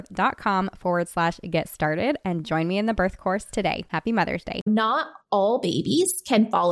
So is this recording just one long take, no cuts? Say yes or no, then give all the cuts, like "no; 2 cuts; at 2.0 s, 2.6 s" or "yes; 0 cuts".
no; 1 cut; at 4.7 s